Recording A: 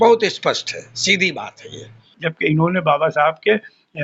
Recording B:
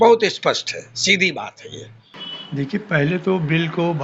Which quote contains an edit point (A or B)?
A